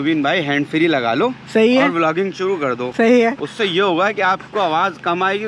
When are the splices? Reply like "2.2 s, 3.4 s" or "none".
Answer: none